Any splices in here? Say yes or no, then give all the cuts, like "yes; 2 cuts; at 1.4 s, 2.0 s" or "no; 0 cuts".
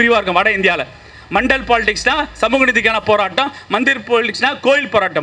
no; 0 cuts